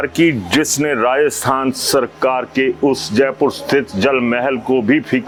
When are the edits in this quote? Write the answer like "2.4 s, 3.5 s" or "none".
none